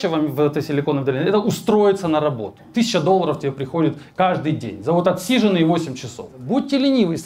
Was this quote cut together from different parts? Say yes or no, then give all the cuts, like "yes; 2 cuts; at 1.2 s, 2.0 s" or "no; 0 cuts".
yes; 2 cuts; at 2.6 s, 6.3 s